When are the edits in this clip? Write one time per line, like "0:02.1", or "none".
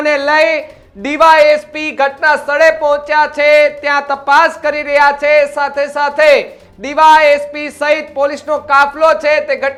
none